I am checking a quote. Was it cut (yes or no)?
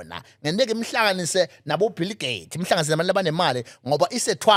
no